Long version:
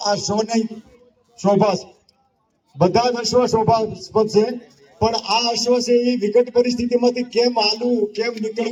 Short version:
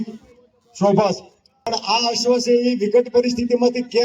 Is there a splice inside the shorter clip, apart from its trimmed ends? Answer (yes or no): yes